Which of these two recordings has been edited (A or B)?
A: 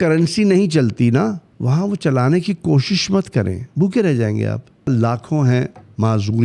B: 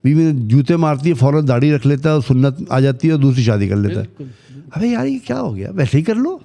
A